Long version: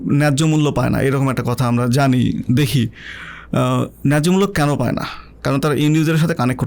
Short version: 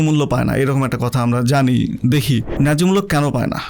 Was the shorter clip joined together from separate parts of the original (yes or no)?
yes